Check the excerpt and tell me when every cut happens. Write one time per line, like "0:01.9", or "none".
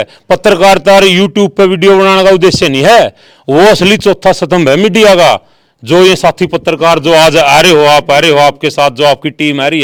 none